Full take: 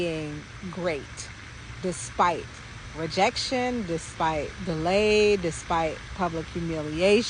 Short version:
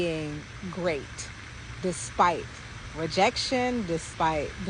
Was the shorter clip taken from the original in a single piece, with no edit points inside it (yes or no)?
yes